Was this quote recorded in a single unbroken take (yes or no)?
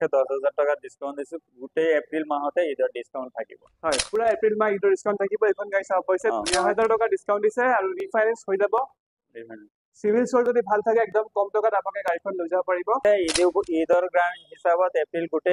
no